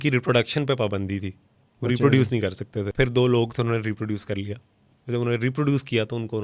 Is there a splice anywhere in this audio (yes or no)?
yes